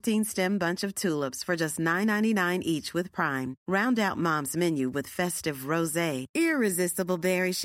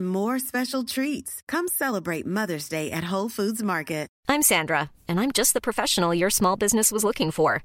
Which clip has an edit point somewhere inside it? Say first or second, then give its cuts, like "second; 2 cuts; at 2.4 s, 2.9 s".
second; 1 cut; at 4.1 s